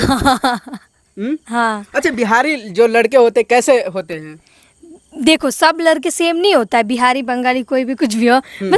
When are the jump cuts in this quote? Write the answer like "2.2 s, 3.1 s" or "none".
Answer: none